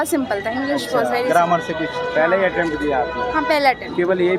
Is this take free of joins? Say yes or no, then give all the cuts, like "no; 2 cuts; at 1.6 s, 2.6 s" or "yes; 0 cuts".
yes; 0 cuts